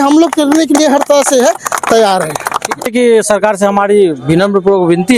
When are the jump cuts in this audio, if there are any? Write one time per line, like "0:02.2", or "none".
0:02.9

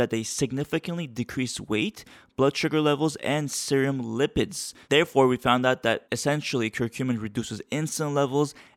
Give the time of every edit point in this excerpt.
0:04.8

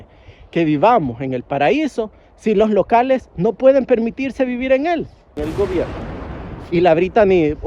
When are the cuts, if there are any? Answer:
0:05.4

